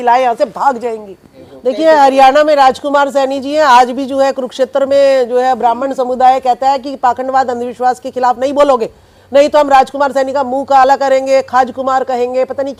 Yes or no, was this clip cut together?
no